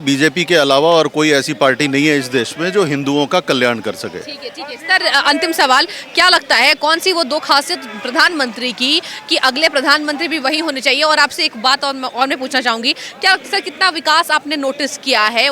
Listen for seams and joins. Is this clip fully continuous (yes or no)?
yes